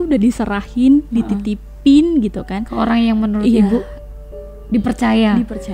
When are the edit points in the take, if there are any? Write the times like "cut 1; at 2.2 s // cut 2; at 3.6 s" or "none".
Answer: none